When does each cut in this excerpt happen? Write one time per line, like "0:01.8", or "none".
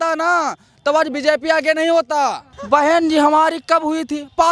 0:02.5